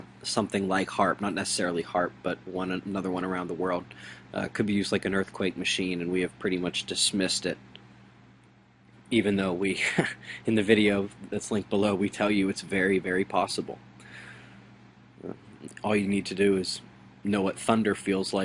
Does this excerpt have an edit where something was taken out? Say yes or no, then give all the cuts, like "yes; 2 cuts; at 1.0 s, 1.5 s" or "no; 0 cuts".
no; 0 cuts